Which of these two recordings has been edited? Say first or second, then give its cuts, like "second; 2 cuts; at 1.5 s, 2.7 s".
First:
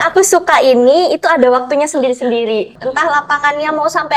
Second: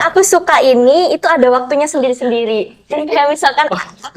first; 1 cut; at 2.8 s